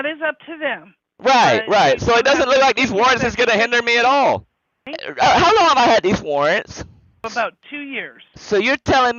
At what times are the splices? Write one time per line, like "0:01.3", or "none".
0:05.0
0:07.2